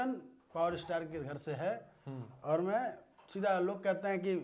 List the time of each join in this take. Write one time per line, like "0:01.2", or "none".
none